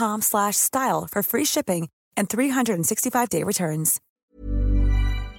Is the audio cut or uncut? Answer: cut